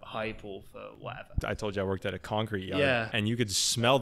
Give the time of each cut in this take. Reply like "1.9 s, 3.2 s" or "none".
1.4 s, 3.1 s